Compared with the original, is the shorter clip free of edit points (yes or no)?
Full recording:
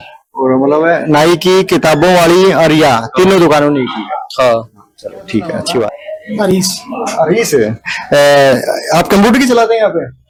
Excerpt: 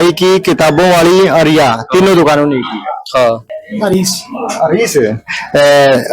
no